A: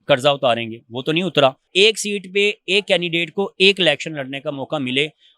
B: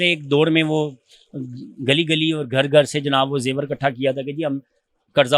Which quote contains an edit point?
A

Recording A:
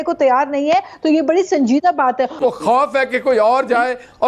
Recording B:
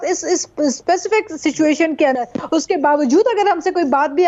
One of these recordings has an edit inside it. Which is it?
A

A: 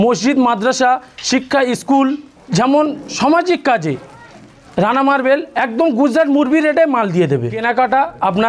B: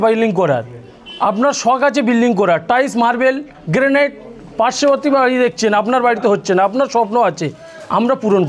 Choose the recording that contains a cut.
A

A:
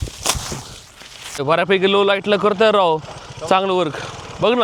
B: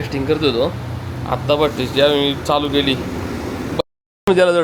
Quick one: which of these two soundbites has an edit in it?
A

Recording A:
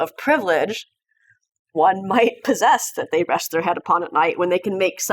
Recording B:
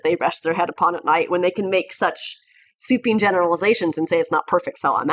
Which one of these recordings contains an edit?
A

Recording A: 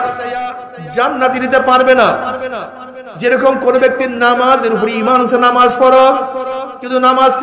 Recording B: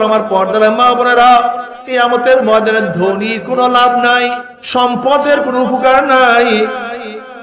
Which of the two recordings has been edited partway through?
B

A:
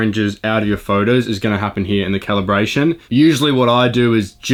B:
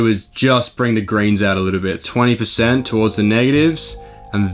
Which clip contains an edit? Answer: B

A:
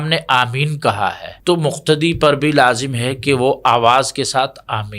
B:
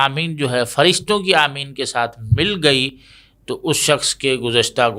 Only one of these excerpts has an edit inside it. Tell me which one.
A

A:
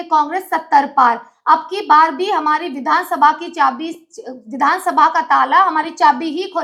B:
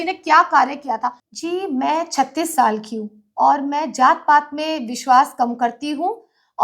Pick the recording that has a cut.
B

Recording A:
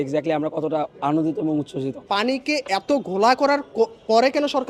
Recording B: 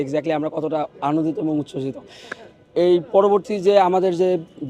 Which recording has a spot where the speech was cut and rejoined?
A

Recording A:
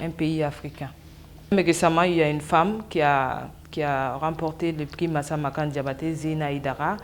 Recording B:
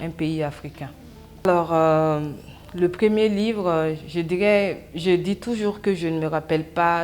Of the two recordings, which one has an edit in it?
A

